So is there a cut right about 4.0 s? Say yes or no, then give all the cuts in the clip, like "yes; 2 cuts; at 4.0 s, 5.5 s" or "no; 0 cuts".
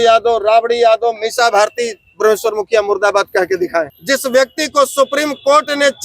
yes; 1 cut; at 4.0 s